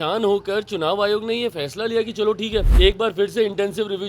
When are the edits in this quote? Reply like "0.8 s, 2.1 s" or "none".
2.7 s